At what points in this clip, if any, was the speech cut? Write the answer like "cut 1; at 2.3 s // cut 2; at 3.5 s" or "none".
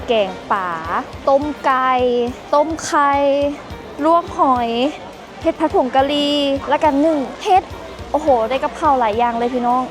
cut 1; at 1.1 s // cut 2; at 2.4 s // cut 3; at 6.6 s // cut 4; at 7.3 s